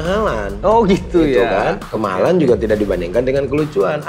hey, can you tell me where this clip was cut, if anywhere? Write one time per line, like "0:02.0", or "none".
none